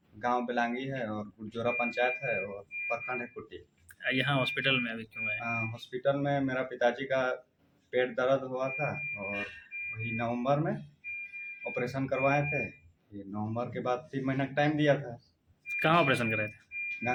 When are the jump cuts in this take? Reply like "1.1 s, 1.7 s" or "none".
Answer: none